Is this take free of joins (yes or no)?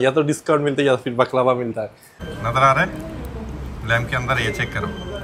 no